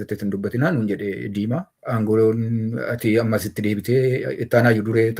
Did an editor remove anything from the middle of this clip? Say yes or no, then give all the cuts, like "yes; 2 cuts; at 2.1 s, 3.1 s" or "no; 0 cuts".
yes; 1 cut; at 1.7 s